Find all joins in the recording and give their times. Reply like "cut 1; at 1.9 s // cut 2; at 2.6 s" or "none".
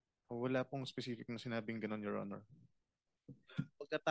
none